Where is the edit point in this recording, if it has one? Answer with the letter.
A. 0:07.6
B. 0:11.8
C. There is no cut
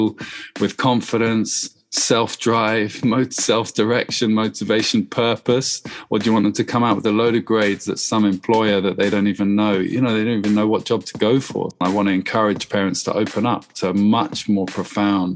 B